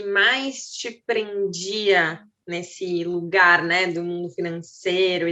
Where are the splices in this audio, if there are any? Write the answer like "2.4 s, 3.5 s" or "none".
none